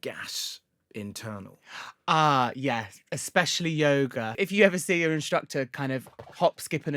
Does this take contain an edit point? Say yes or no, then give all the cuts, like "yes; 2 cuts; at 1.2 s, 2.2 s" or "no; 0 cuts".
yes; 1 cut; at 4.3 s